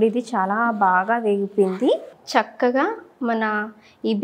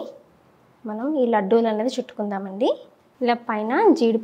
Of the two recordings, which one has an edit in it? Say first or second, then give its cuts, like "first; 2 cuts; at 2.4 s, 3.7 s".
first; 1 cut; at 2.1 s